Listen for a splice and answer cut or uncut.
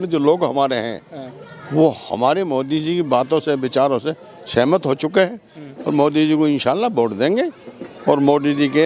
uncut